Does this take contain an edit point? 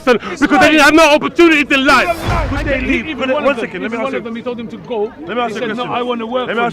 yes; 1 cut; at 2.4 s

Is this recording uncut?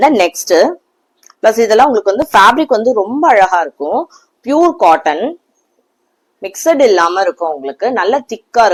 yes; 0 cuts

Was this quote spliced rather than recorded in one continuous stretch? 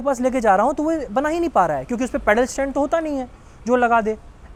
no; 0 cuts

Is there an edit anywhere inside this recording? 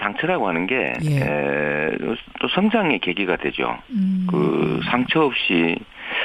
no; 0 cuts

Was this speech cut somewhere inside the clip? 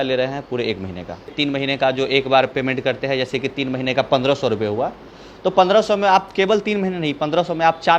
yes; 1 cut; at 1.3 s

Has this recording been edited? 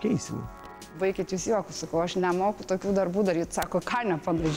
yes; 2 cuts; at 1.0 s, 2.2 s

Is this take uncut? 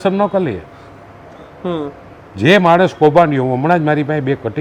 yes; 0 cuts

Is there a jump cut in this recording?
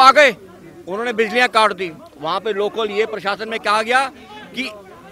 no; 0 cuts

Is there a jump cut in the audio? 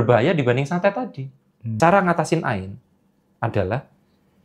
yes; 1 cut; at 1.6 s

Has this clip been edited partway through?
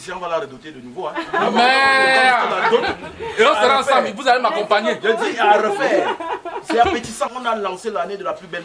yes; 1 cut; at 7.4 s

